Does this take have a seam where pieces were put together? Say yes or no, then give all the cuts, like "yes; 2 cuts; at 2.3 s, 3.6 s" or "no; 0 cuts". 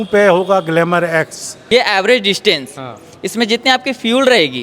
yes; 1 cut; at 1.5 s